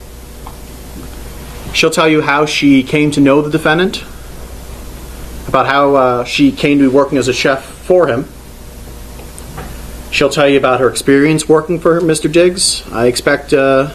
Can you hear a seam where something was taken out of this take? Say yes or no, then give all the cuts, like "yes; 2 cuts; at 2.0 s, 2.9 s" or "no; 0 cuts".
no; 0 cuts